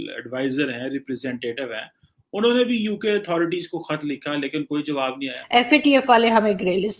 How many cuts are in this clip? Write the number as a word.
one